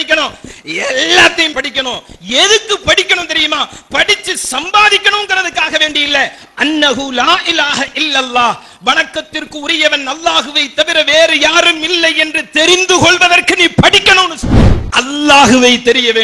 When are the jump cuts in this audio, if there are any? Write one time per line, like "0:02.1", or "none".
0:01.5
0:14.8